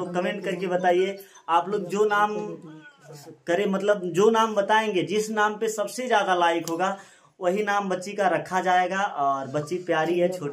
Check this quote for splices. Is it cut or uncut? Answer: uncut